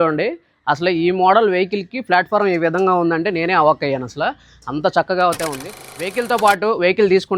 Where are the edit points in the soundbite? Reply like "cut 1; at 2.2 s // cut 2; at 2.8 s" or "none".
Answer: cut 1; at 5.6 s